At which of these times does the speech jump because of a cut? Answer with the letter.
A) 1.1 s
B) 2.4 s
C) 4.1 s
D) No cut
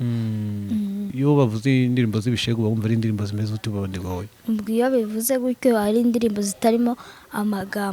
A